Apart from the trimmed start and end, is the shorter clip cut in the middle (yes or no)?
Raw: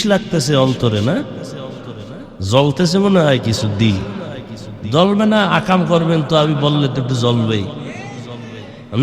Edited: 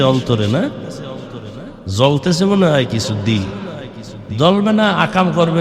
no